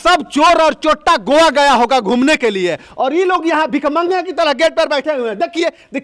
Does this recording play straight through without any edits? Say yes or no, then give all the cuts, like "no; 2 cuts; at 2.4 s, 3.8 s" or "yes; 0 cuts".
yes; 0 cuts